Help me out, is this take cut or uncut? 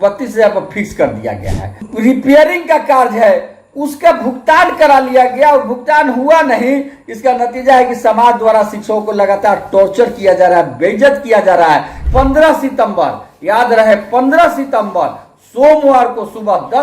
cut